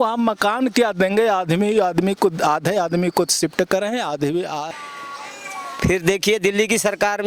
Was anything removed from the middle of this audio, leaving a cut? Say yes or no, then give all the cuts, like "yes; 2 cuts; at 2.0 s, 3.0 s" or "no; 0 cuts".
yes; 1 cut; at 4.7 s